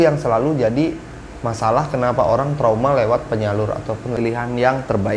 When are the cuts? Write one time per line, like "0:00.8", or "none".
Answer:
0:04.2